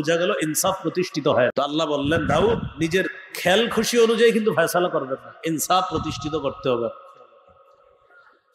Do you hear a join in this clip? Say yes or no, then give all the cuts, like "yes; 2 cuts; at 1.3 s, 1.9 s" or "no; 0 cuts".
no; 0 cuts